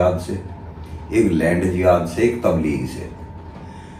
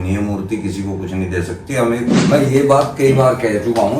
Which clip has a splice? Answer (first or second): second